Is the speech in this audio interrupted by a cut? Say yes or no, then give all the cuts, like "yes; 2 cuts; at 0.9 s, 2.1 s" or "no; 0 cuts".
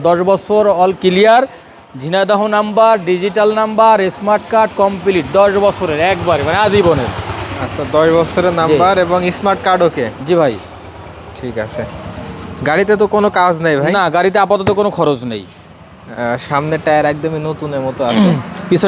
no; 0 cuts